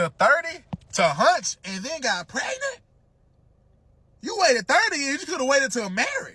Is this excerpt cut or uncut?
uncut